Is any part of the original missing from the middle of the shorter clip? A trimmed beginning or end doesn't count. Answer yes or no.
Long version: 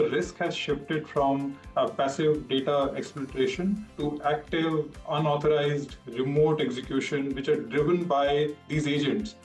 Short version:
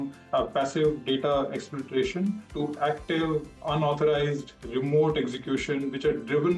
no